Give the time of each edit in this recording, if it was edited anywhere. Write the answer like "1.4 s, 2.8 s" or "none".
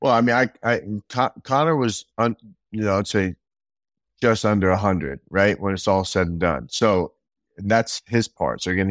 none